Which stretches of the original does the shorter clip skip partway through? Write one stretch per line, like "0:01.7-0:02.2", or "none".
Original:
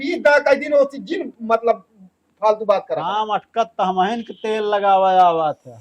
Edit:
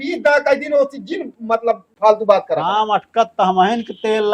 0:01.9-0:02.3